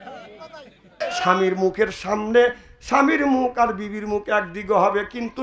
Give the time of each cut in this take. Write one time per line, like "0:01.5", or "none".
0:01.0